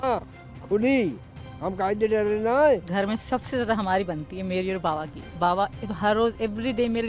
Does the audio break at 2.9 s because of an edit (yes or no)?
yes